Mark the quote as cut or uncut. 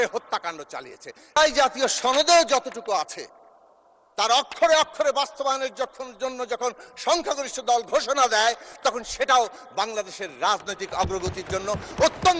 cut